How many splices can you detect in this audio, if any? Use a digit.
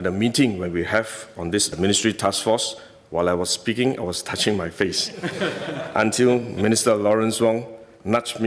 0